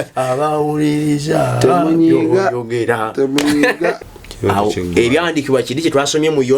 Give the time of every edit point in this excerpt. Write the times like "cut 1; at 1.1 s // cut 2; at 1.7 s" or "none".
cut 1; at 4.0 s